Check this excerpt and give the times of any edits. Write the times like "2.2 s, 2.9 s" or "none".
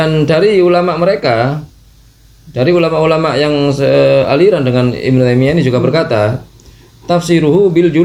none